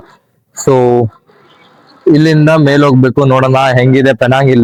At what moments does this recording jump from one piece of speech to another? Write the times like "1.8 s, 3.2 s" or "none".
none

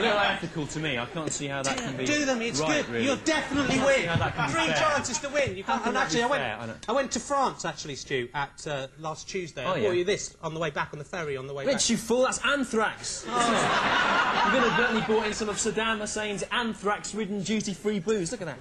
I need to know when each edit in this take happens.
none

